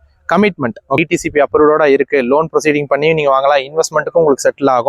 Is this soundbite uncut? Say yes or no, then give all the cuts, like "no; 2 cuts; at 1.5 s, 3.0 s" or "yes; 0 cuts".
no; 1 cut; at 1.0 s